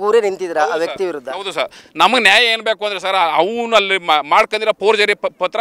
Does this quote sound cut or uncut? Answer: uncut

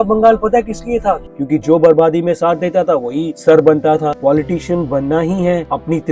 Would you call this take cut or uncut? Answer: cut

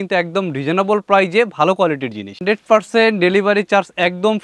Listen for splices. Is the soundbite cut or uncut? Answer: cut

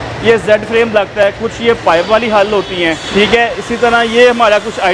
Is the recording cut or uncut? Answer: cut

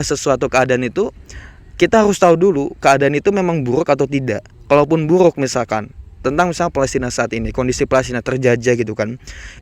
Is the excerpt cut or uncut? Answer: uncut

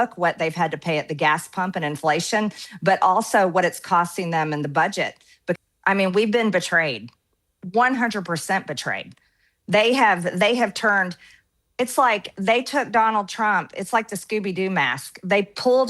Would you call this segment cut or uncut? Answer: cut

